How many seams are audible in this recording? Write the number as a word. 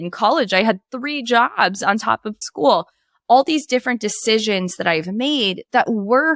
one